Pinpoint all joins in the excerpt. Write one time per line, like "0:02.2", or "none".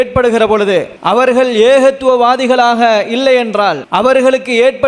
0:00.9
0:03.8